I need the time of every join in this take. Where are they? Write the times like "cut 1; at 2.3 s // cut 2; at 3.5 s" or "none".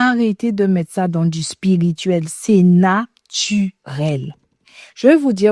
none